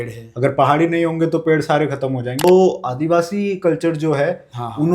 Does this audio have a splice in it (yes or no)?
yes